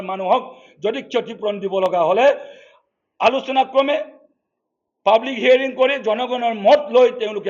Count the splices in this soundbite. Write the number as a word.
zero